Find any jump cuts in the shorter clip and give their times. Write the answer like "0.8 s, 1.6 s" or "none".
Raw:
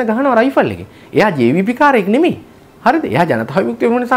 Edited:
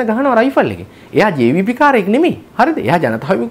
2.4 s